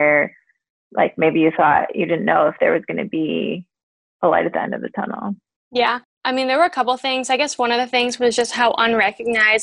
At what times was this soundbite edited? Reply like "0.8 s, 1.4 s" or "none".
6.1 s